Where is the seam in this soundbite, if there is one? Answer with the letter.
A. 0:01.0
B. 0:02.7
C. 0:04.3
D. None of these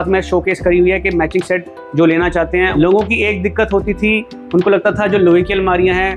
B